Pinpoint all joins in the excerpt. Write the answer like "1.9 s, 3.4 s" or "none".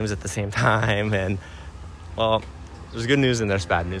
none